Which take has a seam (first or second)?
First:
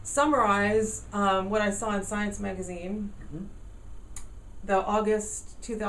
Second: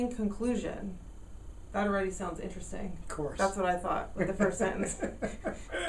first